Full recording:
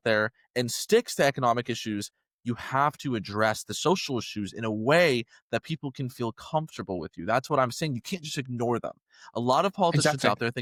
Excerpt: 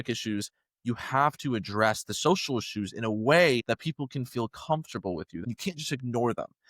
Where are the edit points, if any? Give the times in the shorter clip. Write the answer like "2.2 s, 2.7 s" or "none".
3.6 s, 5.4 s